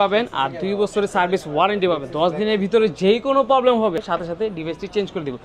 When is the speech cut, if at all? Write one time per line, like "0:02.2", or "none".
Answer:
0:04.0